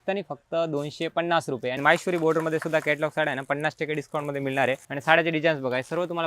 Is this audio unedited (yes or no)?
no